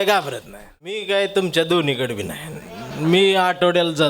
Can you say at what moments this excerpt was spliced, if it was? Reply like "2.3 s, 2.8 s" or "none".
1.0 s